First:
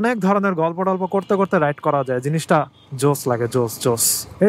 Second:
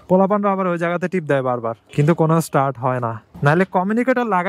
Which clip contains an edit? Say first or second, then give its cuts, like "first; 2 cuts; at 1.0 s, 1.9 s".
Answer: second; 1 cut; at 3.2 s